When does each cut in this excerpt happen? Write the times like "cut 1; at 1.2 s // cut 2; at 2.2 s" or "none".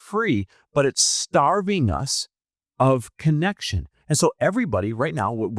none